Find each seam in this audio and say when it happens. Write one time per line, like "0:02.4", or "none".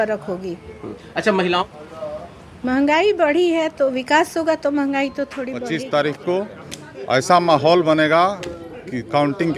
0:01.6
0:05.6